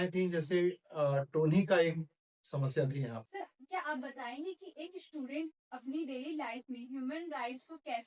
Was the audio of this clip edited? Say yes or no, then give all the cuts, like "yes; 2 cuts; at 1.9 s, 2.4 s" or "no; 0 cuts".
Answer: yes; 1 cut; at 3.2 s